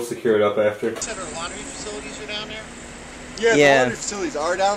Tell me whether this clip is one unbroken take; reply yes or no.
no